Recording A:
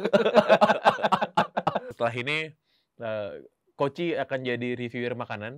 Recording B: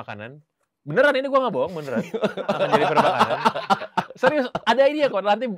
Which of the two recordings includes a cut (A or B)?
A